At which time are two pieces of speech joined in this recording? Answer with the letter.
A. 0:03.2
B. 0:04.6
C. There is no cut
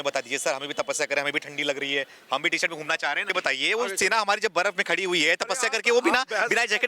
A